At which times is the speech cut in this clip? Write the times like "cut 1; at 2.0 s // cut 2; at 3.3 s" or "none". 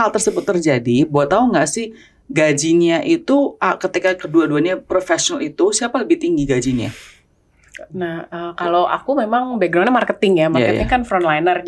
none